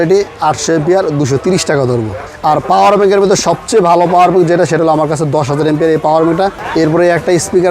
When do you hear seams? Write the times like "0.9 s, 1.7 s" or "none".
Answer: 2.2 s, 6.6 s